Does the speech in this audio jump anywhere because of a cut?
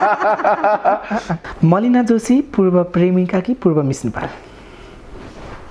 yes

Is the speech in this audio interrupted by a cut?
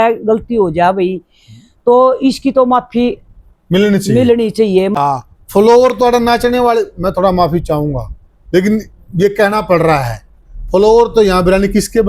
yes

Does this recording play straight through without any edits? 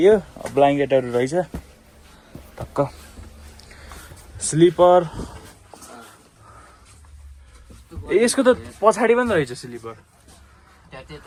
yes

